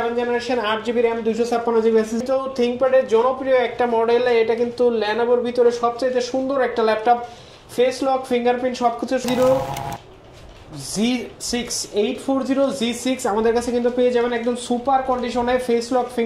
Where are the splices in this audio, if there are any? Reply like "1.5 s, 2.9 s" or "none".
2.2 s, 9.2 s